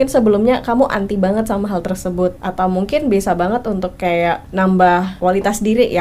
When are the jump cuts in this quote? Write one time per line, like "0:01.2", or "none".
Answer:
0:02.4
0:04.4
0:05.1

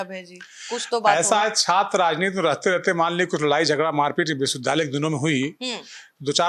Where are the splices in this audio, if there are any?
none

